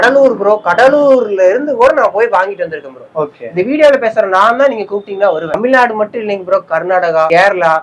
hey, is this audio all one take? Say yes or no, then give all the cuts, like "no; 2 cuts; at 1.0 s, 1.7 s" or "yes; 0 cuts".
no; 1 cut; at 5.5 s